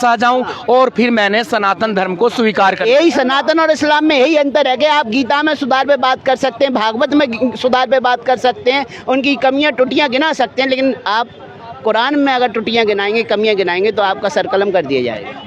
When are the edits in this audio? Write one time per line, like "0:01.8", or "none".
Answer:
none